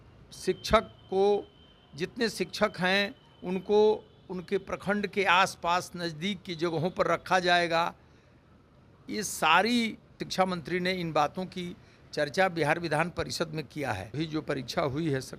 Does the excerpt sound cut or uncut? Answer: cut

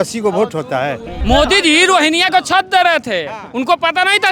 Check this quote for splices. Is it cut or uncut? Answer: cut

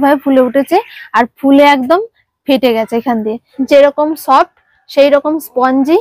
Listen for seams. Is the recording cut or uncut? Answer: cut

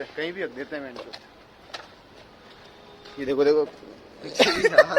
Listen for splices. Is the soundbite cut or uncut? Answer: uncut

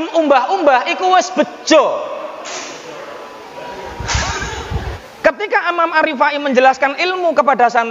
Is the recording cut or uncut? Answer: cut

